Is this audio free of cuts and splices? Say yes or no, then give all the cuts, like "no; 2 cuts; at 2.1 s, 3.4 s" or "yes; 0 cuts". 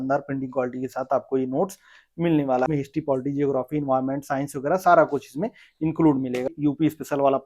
no; 2 cuts; at 2.7 s, 6.6 s